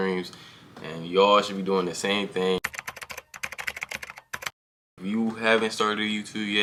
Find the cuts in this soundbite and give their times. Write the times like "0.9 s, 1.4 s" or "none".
none